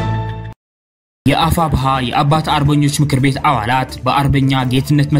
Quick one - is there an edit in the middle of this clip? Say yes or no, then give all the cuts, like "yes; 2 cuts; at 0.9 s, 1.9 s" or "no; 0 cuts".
yes; 1 cut; at 1.2 s